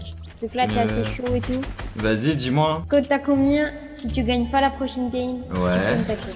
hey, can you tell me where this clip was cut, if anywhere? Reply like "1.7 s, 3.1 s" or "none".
none